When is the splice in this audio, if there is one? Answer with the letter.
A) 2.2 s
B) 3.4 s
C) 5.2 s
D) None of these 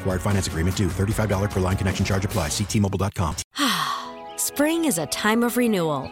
B